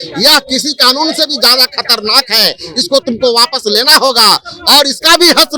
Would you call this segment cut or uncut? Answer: uncut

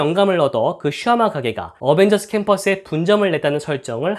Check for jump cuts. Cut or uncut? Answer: uncut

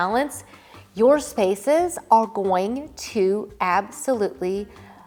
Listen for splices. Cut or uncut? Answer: uncut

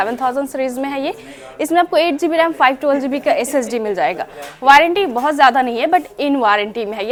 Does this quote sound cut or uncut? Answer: uncut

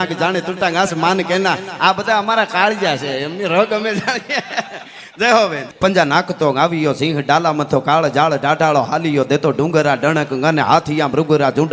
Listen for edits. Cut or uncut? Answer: cut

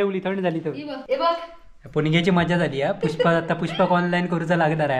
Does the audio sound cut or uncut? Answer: cut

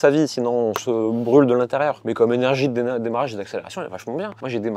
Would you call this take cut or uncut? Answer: uncut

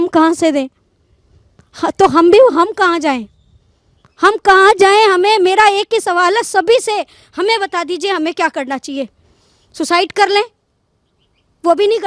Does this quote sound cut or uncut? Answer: uncut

